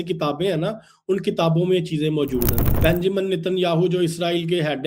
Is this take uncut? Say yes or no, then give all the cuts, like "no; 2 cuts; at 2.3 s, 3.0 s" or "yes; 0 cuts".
no; 1 cut; at 2.6 s